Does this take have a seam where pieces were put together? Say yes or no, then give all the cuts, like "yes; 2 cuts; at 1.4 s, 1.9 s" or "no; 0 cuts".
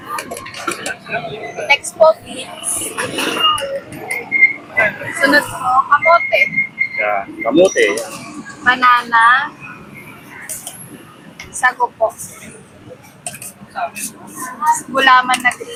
no; 0 cuts